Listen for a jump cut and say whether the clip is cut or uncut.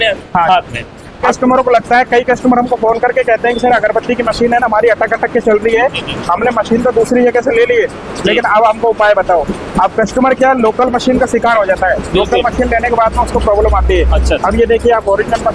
cut